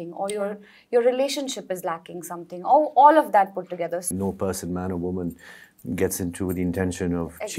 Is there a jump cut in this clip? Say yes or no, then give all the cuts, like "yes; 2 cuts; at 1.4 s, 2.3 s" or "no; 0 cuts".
yes; 1 cut; at 4.1 s